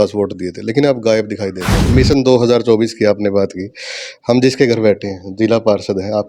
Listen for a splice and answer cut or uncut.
cut